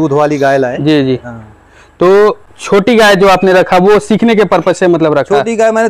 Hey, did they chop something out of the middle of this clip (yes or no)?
no